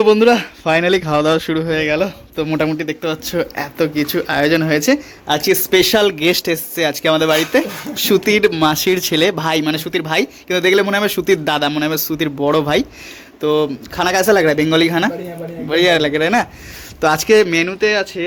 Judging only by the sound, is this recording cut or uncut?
uncut